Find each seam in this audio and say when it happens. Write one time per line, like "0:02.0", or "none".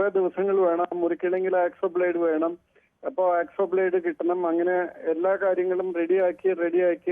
none